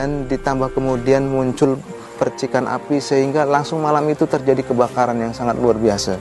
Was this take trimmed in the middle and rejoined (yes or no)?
no